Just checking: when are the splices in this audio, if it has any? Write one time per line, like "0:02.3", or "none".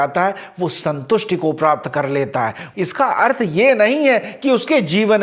0:02.7